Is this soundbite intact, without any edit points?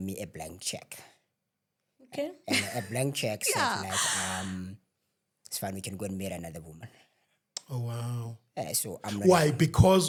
yes; 0 cuts

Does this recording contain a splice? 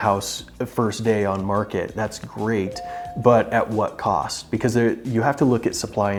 no; 0 cuts

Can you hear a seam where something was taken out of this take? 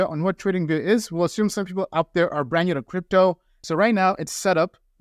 yes; 1 cut; at 3.5 s

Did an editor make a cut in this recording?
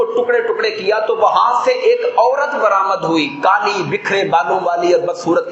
no; 0 cuts

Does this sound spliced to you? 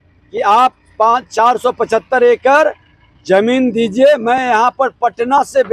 no; 0 cuts

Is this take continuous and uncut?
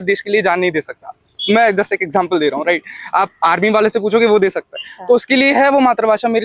yes; 0 cuts

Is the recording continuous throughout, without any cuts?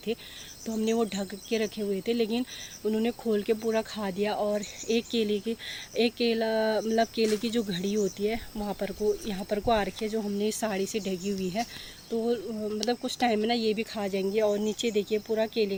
yes; 0 cuts

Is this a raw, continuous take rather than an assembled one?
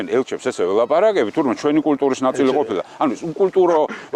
yes; 0 cuts

